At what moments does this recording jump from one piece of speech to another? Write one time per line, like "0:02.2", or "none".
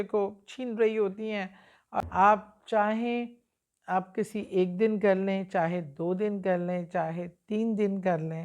0:02.0